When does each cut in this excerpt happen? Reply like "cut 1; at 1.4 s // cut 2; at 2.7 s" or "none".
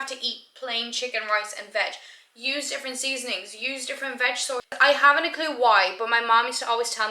cut 1; at 4.8 s